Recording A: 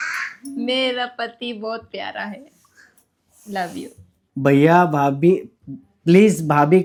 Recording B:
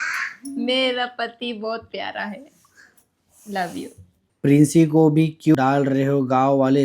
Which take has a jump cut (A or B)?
B